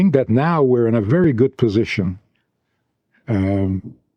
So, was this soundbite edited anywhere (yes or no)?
no